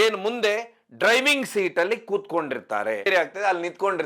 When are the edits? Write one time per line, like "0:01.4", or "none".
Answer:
0:03.0